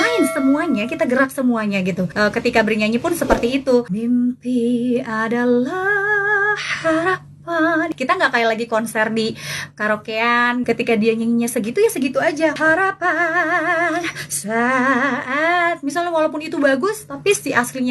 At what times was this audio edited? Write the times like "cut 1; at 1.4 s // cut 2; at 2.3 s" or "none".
cut 1; at 2.1 s // cut 2; at 3.9 s // cut 3; at 7.9 s // cut 4; at 10.6 s // cut 5; at 12.6 s